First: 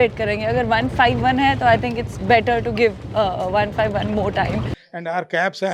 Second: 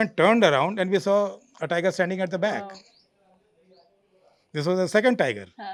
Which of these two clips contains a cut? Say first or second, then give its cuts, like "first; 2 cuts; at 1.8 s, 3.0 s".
first; 1 cut; at 4.8 s